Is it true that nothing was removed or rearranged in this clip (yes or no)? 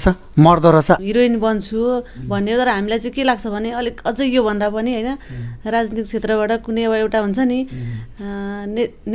no